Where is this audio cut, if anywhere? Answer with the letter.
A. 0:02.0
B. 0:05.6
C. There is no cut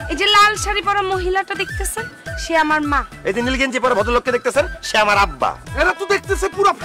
B